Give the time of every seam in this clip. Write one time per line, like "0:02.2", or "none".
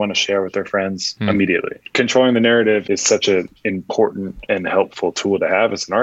0:01.1
0:01.8
0:02.8
0:04.3